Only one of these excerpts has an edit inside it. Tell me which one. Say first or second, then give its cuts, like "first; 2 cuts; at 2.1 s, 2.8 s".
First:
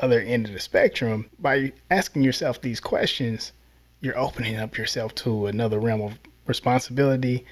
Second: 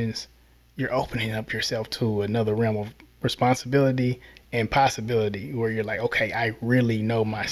first; 1 cut; at 1.3 s